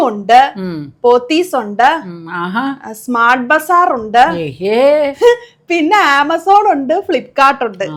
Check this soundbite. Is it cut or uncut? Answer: uncut